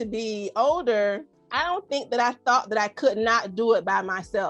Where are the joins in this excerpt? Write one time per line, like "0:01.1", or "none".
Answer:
0:01.3